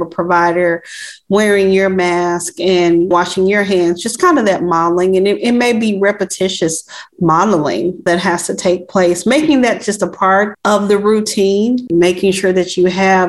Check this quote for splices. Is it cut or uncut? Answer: cut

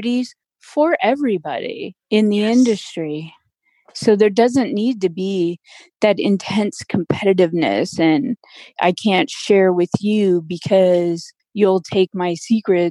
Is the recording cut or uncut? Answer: cut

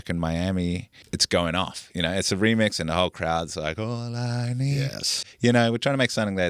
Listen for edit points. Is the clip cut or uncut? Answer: cut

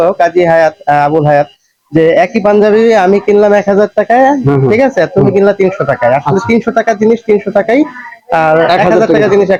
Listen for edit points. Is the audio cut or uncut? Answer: uncut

